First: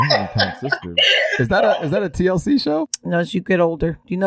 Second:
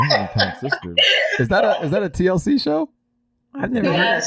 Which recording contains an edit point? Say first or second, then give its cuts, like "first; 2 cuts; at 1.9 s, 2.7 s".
first; 1 cut; at 3.0 s